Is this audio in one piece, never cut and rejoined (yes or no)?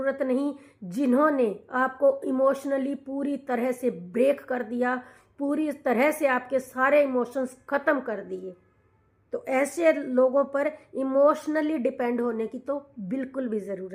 yes